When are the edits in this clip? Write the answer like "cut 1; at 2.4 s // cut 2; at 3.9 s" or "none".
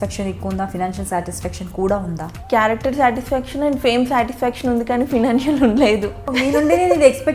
cut 1; at 2.3 s // cut 2; at 6.3 s